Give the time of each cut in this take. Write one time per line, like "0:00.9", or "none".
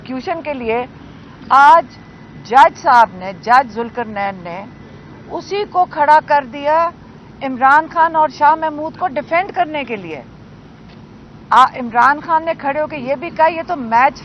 none